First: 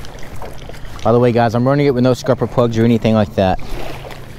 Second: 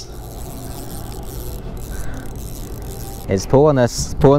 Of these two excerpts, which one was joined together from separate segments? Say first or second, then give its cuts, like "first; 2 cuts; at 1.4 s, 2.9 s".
second; 1 cut; at 3.2 s